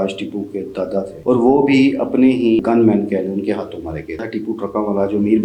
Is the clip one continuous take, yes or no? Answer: no